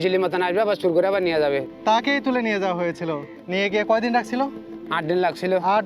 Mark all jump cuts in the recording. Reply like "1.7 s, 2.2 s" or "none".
1.7 s, 3.3 s